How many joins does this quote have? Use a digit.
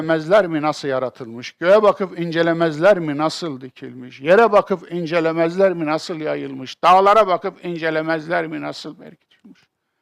1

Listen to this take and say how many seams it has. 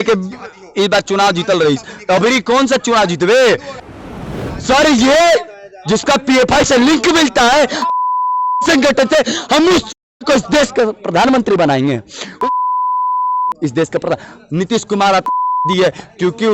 1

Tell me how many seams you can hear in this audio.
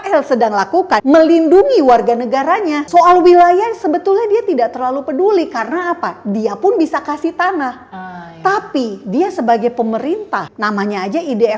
3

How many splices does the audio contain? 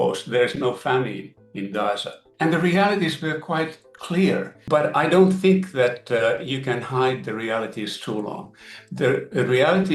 1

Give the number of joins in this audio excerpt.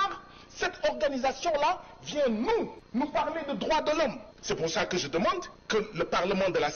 3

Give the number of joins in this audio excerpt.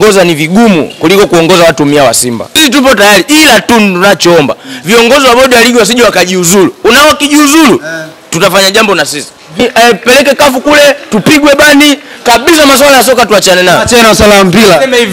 2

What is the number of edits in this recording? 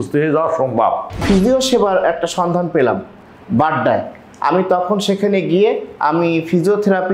1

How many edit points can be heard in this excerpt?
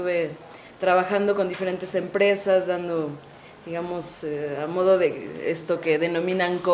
1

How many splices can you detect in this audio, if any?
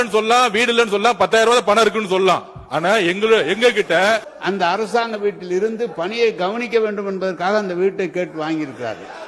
1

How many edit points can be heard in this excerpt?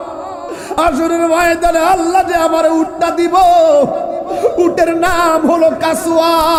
0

